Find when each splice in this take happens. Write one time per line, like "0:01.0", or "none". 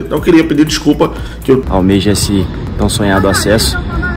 0:01.6